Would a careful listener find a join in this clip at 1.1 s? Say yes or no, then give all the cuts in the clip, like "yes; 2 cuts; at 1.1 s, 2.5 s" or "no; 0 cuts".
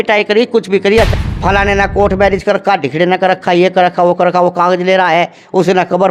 yes; 1 cut; at 1.1 s